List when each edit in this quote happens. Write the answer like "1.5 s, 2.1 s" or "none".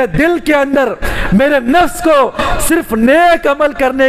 none

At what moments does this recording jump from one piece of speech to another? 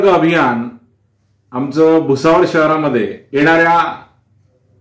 3.2 s

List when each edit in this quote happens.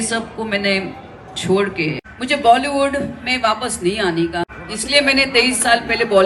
2.1 s, 4.6 s

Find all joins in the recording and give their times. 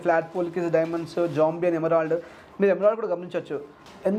none

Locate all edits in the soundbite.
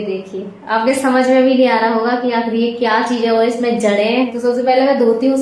4.3 s

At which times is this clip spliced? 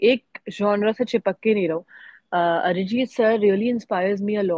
none

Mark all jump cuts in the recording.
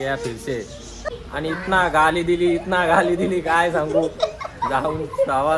0.9 s

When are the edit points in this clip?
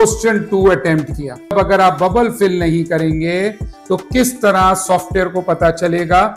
none

